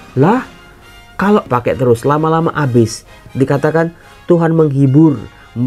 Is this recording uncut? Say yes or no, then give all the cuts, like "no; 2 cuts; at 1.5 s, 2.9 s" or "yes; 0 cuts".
no; 2 cuts; at 1.5 s, 3.2 s